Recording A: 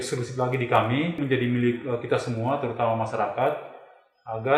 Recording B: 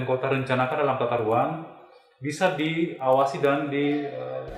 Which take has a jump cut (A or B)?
A